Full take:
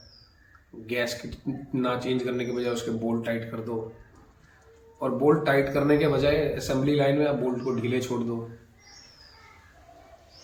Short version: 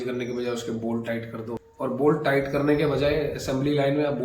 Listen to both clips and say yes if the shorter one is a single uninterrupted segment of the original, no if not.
no